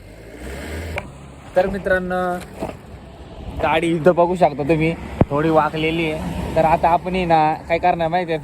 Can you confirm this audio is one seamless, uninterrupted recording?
no; 1 cut; at 1.0 s

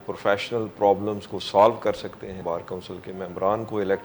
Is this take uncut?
no; 1 cut; at 2.4 s

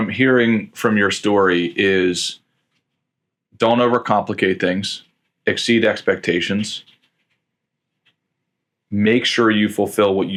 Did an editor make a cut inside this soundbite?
no; 0 cuts

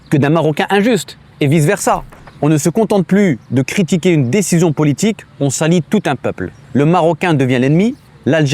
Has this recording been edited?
yes; 2 cuts; at 2.1 s, 6.5 s

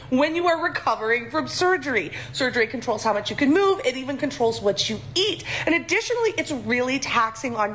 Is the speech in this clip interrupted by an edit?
yes; 2 cuts; at 2.2 s, 4.6 s

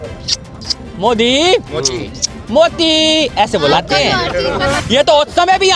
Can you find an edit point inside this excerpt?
yes; 1 cut; at 4.8 s

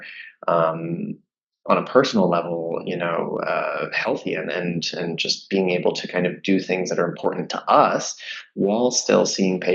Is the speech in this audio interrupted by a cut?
no; 0 cuts

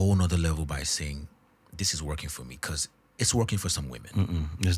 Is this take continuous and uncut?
yes; 0 cuts

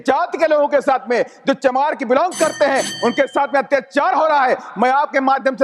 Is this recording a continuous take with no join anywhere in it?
yes; 0 cuts

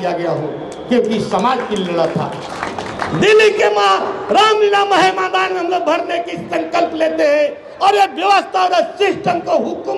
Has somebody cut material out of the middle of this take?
no; 0 cuts

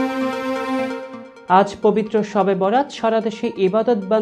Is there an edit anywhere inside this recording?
no; 0 cuts

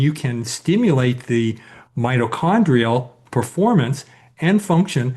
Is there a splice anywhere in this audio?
yes; 1 cut; at 3.2 s

